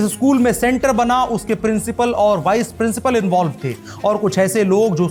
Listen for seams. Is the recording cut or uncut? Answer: uncut